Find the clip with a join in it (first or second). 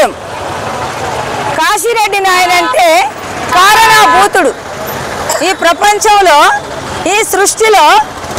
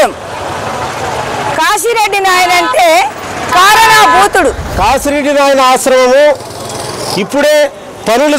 second